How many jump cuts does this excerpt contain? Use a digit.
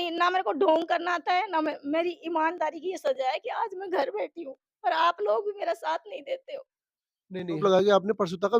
1